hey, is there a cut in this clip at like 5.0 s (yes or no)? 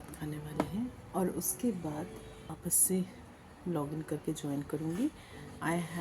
no